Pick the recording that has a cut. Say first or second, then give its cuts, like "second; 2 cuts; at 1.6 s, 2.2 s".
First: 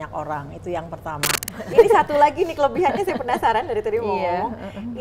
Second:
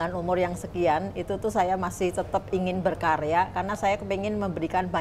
first; 1 cut; at 1.5 s